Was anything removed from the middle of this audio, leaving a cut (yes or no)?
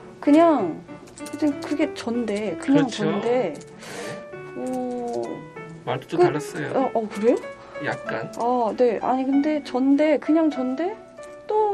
yes